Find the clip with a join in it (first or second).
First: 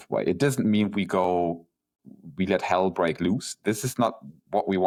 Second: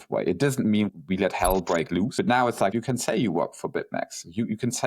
second